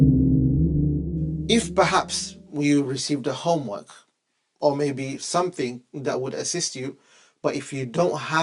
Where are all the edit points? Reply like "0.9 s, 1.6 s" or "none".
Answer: 1.4 s